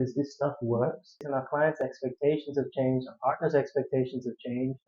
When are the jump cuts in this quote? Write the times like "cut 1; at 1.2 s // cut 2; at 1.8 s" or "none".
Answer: cut 1; at 1.2 s